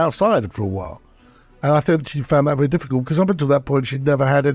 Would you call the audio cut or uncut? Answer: uncut